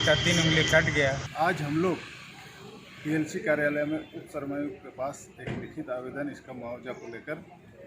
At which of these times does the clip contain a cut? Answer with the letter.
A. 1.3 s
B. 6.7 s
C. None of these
A